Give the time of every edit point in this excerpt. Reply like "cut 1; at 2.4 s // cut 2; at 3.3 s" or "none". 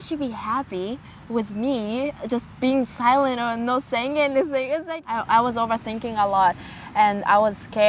cut 1; at 5.0 s